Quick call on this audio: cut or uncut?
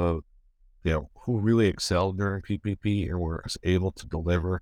uncut